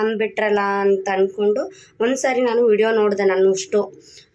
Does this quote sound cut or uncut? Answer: uncut